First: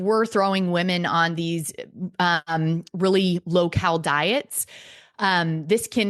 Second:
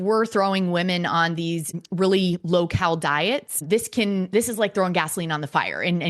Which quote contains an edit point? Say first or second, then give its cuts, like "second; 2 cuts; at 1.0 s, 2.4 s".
second; 2 cuts; at 1.8 s, 3.6 s